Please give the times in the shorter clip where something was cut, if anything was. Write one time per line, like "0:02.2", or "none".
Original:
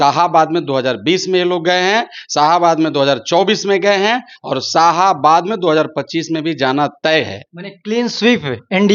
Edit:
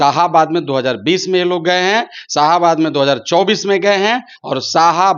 none